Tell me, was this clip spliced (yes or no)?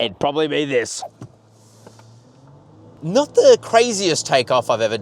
yes